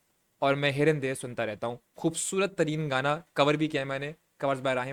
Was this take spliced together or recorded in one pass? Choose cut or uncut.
uncut